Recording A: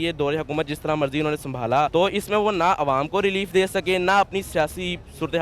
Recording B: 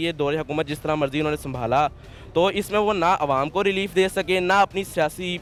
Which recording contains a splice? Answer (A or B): A